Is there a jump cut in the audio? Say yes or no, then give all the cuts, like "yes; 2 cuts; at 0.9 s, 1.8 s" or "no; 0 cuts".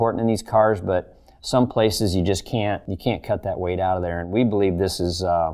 yes; 1 cut; at 2.8 s